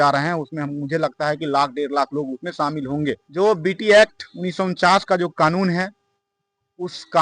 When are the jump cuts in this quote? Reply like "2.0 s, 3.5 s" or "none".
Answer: 3.2 s

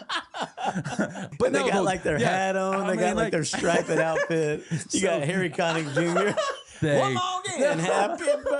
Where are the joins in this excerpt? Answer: 1.2 s, 6.8 s

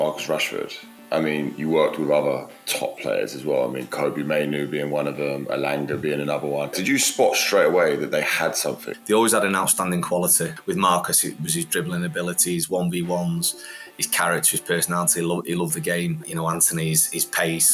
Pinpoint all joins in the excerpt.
6.8 s, 8.9 s, 10.6 s, 16.3 s

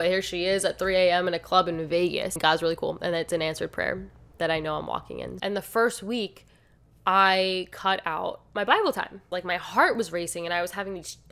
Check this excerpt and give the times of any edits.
2.4 s, 5.3 s, 9.2 s

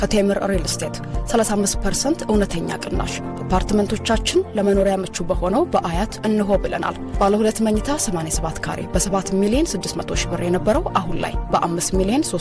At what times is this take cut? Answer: none

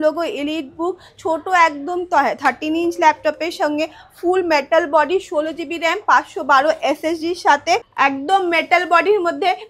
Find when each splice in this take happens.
7.9 s

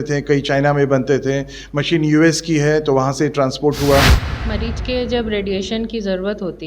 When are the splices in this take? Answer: 4.2 s

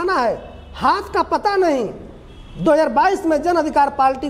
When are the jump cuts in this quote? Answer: none

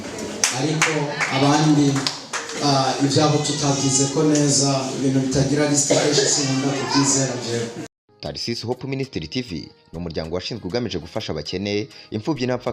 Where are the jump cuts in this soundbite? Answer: 7.8 s

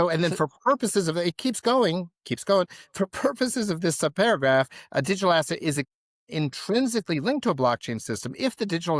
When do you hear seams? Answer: none

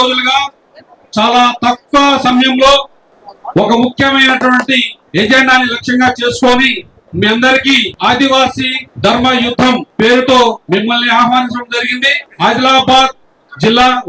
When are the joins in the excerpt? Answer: 5.0 s, 7.9 s, 8.8 s, 9.9 s, 10.6 s

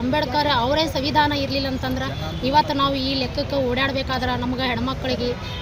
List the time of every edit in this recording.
none

